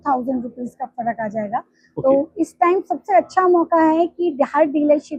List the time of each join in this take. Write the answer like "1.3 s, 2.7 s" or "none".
none